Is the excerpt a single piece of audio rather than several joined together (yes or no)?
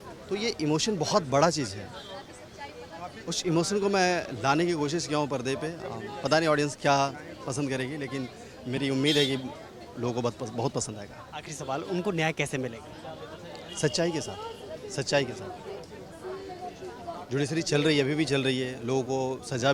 yes